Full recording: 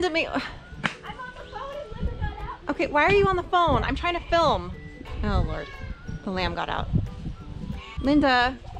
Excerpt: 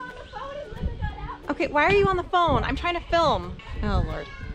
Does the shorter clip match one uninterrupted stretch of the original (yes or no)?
no